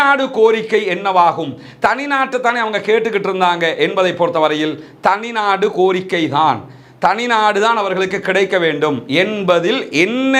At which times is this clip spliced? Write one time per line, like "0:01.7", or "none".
none

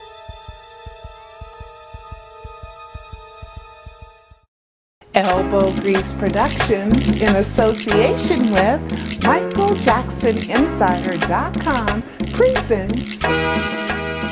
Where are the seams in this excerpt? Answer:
0:05.2

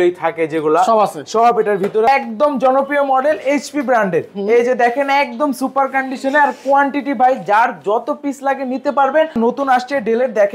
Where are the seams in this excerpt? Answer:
0:02.1
0:09.4

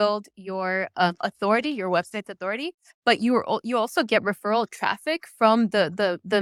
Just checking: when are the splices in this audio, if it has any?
none

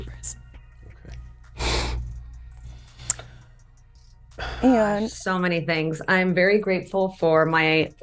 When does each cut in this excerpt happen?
0:05.2

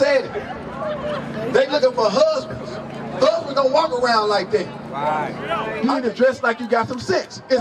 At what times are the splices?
0:05.7

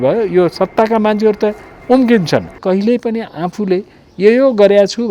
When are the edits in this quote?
0:02.6

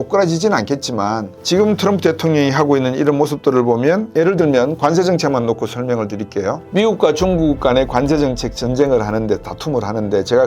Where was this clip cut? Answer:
0:04.1

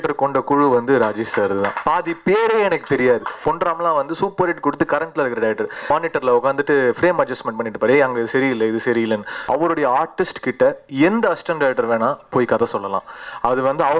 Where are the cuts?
0:01.8
0:03.3
0:05.8
0:09.3

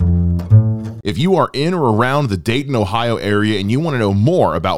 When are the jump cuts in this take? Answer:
0:00.9

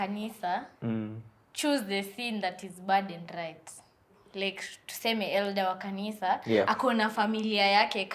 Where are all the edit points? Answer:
0:04.2

